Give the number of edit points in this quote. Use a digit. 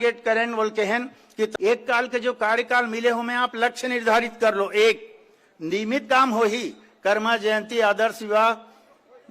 1